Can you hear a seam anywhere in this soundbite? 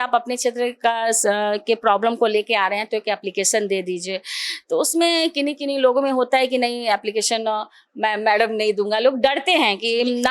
no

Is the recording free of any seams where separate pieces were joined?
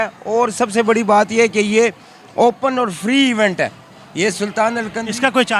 yes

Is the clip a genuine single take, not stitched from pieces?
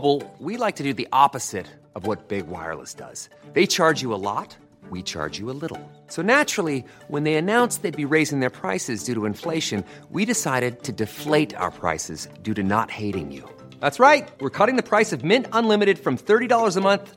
yes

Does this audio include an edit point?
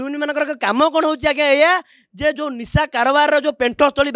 no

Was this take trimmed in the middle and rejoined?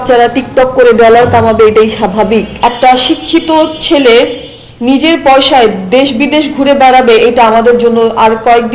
yes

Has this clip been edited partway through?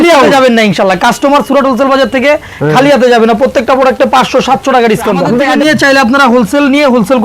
yes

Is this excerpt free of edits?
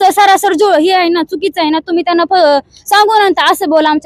yes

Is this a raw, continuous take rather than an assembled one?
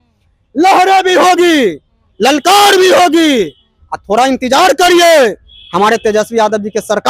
yes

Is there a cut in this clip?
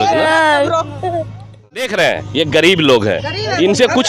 yes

